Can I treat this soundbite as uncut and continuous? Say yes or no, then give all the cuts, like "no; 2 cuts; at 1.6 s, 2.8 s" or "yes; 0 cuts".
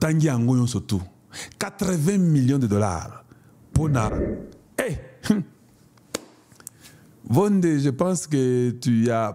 no; 1 cut; at 4.1 s